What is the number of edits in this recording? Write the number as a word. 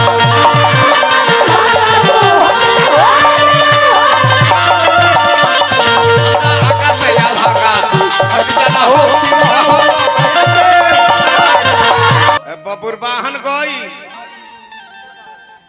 one